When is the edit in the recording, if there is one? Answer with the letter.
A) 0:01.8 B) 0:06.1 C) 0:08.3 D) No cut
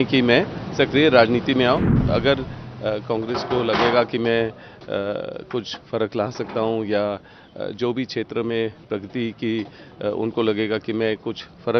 A